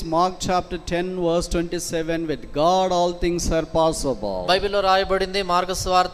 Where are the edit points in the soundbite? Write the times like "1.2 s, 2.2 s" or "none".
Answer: none